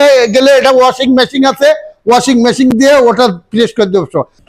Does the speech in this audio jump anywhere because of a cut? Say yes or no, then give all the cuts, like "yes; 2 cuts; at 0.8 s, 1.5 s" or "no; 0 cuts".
no; 0 cuts